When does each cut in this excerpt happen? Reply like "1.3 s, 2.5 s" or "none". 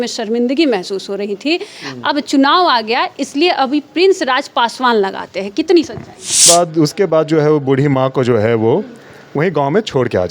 6.5 s

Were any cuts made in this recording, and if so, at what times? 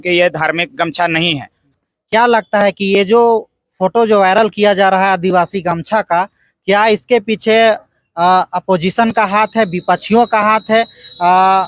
1.7 s

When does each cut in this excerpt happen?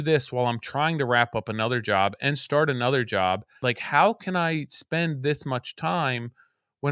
3.5 s

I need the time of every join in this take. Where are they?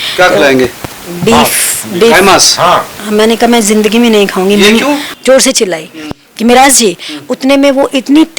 5.1 s

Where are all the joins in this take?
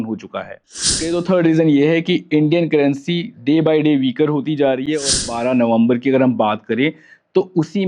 1.0 s, 5.2 s

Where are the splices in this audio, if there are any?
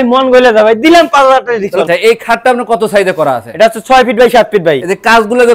1.8 s

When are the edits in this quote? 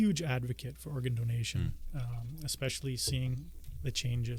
none

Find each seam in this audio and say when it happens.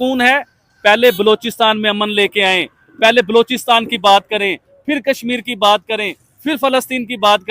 none

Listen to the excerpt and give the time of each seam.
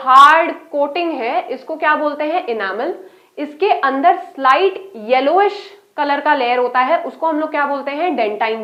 none

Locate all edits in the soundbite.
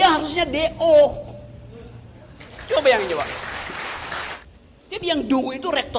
2.5 s, 4.4 s

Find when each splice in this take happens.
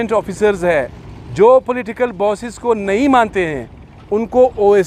none

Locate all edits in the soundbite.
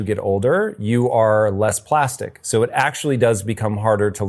none

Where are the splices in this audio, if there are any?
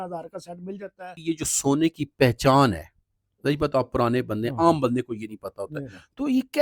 1.1 s

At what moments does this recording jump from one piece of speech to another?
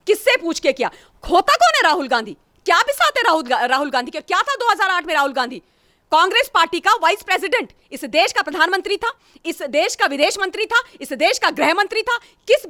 none

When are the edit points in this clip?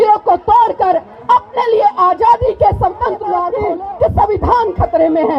3.5 s

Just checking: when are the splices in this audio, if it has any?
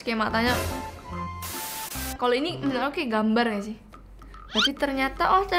2.1 s

